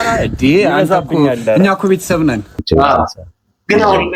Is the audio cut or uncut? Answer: cut